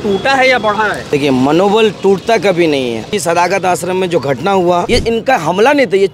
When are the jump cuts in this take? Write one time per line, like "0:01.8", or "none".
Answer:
0:01.0
0:03.1
0:04.9